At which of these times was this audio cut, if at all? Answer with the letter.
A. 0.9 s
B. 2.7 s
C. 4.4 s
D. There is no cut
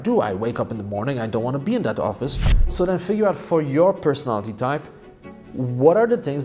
B